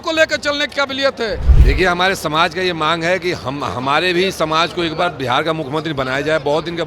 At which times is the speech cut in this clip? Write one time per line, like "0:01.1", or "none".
0:01.5